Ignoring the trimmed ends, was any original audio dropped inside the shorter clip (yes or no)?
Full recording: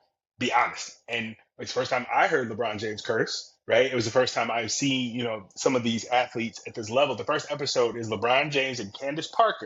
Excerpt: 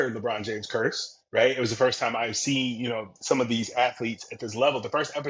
no